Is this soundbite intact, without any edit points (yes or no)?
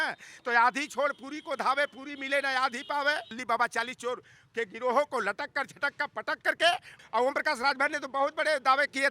no